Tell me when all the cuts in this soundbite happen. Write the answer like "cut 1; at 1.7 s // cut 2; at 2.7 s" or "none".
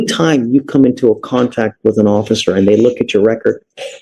none

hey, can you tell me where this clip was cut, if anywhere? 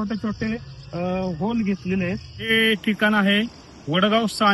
cut 1; at 2.5 s

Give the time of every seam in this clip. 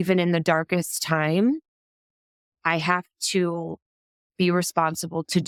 none

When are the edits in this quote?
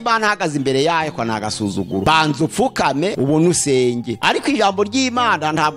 cut 1; at 2.0 s // cut 2; at 3.1 s // cut 3; at 4.1 s

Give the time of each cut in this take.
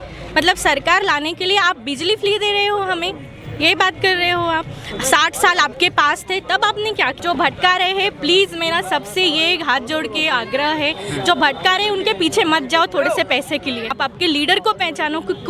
cut 1; at 7.2 s // cut 2; at 13.9 s

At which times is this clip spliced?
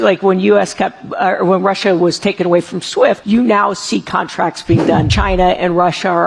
cut 1; at 3.2 s // cut 2; at 5.1 s

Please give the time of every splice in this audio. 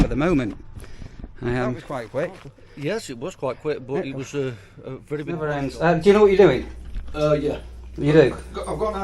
cut 1; at 1.8 s // cut 2; at 5.4 s

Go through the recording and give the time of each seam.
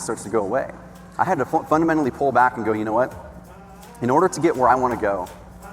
cut 1; at 1.0 s

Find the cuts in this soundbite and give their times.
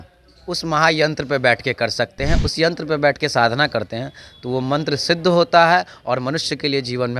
cut 1; at 2.4 s

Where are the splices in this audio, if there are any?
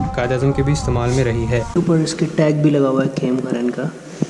cut 1; at 1.7 s

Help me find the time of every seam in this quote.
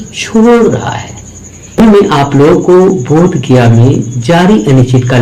cut 1; at 1.8 s

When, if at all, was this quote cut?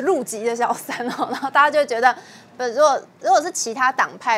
none

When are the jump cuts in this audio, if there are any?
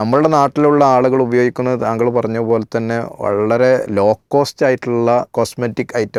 none

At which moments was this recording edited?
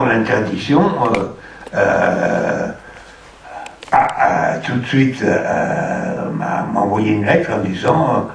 none

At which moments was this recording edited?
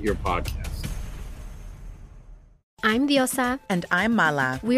none

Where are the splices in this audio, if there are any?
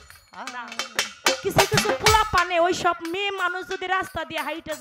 none

